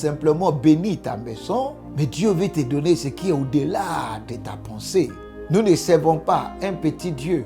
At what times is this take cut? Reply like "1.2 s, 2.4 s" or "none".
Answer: 1.8 s, 5.3 s